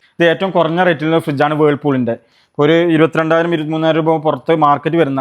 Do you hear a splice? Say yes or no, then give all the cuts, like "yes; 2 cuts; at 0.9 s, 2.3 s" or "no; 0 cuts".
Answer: no; 0 cuts